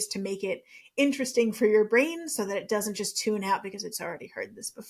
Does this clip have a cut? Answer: no; 0 cuts

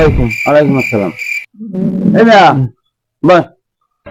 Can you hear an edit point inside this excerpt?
no; 0 cuts

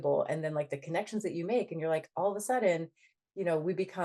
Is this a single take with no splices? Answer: yes; 0 cuts

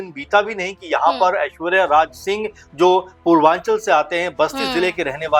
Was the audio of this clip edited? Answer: no; 0 cuts

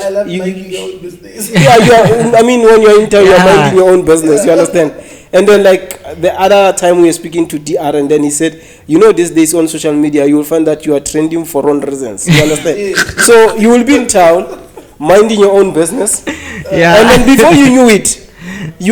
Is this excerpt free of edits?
yes; 0 cuts

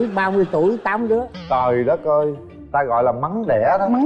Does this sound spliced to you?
no; 0 cuts

